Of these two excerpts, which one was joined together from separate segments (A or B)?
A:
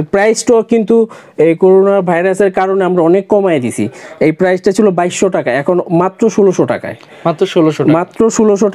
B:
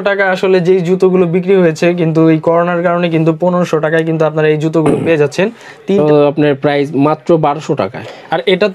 B